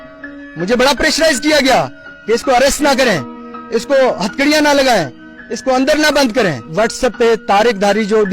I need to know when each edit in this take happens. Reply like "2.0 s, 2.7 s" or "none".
6.7 s